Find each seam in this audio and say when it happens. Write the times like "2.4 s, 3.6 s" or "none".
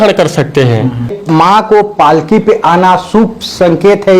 1.2 s